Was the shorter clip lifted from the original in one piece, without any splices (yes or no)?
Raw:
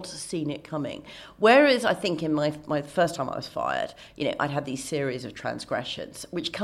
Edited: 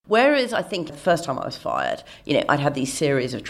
no